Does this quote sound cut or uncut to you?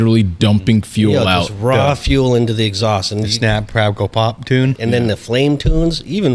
cut